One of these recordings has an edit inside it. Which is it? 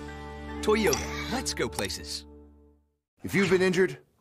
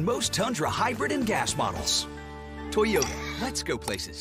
first; 1 cut; at 3.2 s

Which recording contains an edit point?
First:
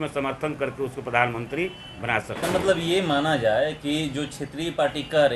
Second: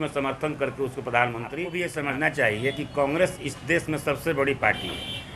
second; 1 cut; at 1.7 s

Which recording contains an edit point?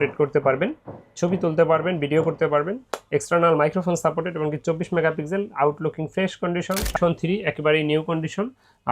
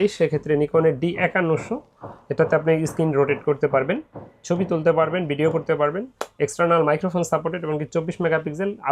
first; 1 cut; at 6.9 s

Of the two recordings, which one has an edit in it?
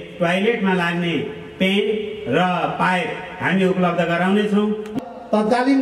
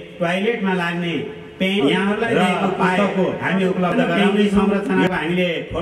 first; 1 cut; at 4.8 s

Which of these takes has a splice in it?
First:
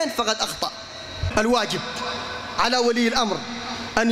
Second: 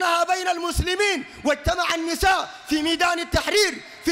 first; 1 cut; at 1.2 s

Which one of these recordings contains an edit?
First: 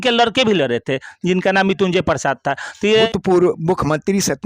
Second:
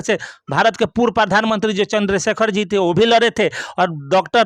first; 1 cut; at 3.0 s

